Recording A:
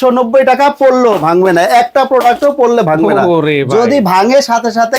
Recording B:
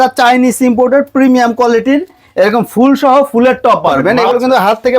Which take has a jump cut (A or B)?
B